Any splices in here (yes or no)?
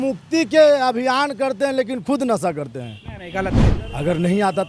yes